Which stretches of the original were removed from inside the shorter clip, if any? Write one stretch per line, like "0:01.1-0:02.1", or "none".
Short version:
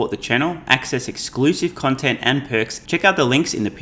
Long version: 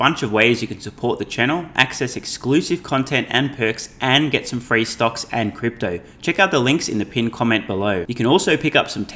0:03.9-0:06.1